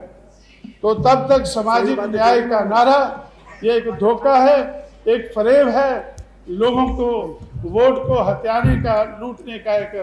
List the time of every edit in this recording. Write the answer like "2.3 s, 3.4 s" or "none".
none